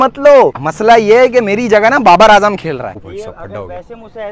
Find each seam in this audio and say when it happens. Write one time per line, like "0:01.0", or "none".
0:02.9